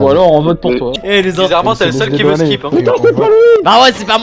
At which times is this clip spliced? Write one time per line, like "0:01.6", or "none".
0:00.9
0:02.6